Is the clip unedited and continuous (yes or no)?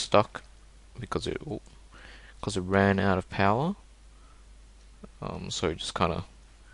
yes